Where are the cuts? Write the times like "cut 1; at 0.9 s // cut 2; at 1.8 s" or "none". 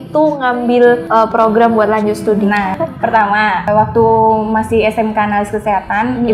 cut 1; at 1.0 s // cut 2; at 2.7 s // cut 3; at 3.7 s